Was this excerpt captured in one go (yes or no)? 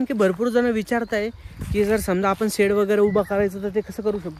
yes